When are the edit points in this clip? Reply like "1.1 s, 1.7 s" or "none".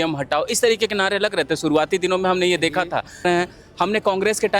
3.2 s

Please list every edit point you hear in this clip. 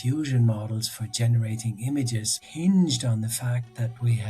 2.4 s

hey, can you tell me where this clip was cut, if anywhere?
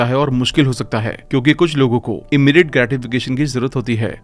none

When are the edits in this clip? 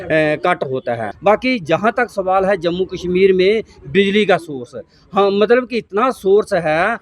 1.1 s

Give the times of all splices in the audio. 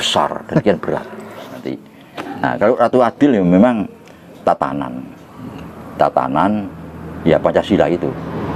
1.6 s

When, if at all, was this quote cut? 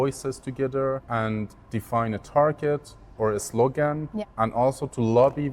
1.0 s, 4.2 s

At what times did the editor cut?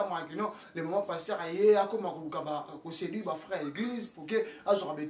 none

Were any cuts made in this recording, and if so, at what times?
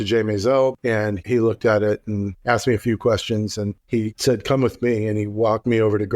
0.8 s, 2.3 s, 3.7 s

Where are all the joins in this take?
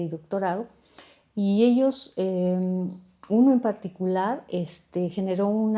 none

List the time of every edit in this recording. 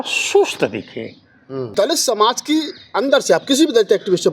1.7 s

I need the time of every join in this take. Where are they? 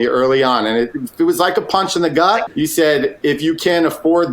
2.5 s

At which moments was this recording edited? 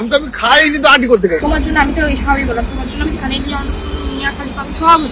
1.4 s

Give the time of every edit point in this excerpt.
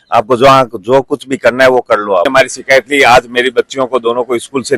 2.3 s

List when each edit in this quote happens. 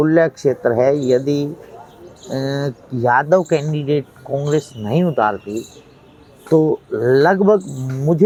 none

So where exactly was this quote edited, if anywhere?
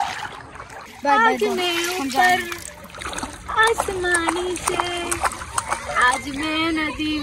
1.0 s

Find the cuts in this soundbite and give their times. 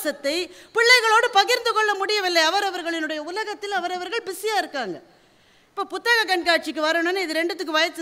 none

